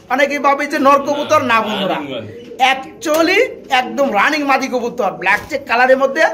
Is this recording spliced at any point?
no; 0 cuts

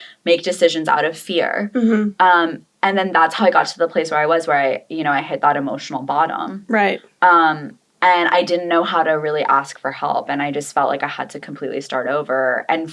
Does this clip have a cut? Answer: no; 0 cuts

